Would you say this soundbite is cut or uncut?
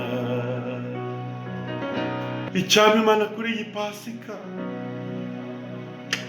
cut